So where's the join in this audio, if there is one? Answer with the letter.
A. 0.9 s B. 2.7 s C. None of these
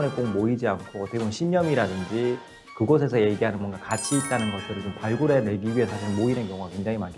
C